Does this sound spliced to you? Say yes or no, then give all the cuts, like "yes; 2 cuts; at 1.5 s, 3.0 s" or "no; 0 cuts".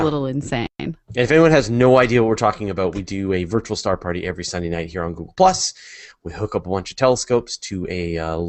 yes; 1 cut; at 7.2 s